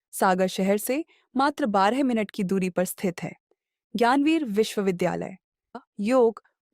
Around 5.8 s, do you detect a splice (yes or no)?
yes